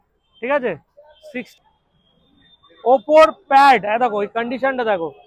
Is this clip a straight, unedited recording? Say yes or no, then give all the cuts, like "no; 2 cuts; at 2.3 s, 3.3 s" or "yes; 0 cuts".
no; 1 cut; at 1.6 s